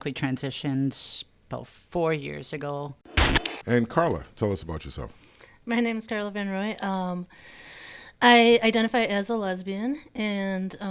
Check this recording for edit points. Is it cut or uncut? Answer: cut